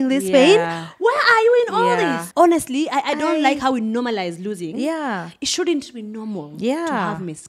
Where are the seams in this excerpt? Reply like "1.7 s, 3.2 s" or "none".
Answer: 2.2 s